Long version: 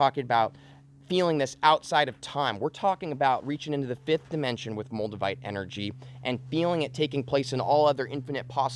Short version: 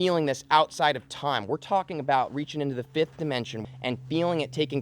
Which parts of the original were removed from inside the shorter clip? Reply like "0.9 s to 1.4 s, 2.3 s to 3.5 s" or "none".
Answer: 4.8 s to 6.1 s